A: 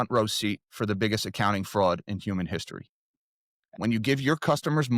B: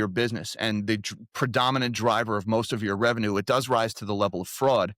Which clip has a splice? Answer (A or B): A